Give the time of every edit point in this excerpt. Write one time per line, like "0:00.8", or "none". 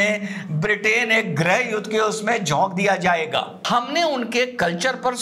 0:03.6